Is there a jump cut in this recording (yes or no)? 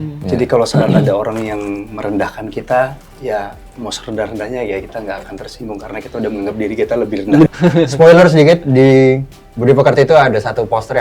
yes